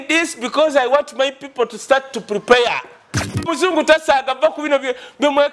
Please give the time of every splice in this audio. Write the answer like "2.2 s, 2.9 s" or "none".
3.5 s

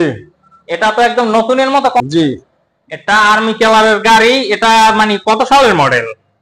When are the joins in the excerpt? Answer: 2.0 s

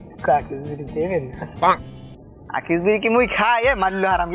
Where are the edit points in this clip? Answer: none

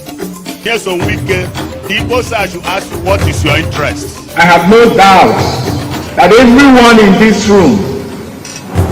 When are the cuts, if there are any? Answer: 1.2 s

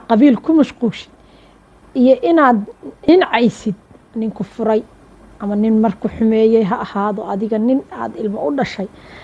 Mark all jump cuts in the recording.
3.1 s

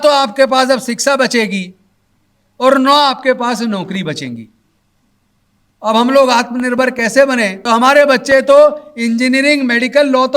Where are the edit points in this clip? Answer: 7.6 s

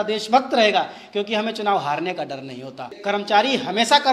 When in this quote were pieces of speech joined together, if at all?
2.9 s

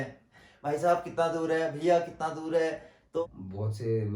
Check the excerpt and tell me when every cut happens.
3.2 s

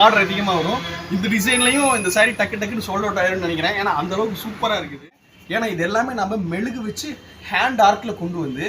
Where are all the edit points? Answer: 5.0 s

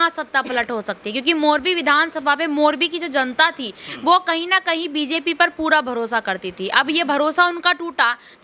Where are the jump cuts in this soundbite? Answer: none

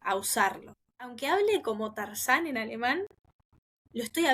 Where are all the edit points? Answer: 1.1 s

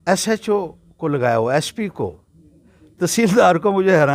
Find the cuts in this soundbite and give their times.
none

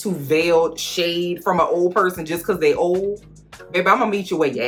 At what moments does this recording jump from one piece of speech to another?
none

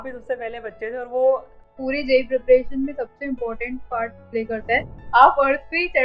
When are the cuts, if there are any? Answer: 1.6 s, 4.9 s

